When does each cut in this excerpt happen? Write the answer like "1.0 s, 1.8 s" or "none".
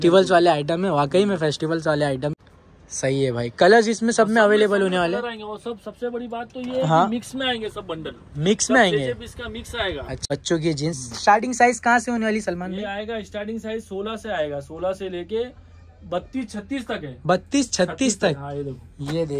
2.3 s, 10.3 s